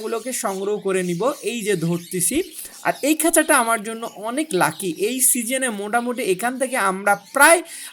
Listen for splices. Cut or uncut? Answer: uncut